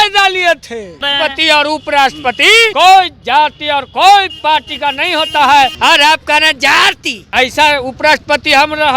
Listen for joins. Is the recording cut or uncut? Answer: cut